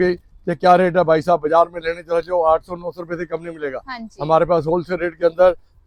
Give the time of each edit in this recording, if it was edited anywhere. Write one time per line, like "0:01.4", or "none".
none